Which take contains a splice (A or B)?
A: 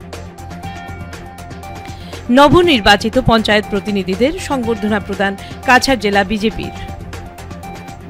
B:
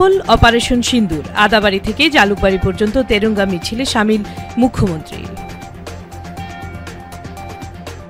A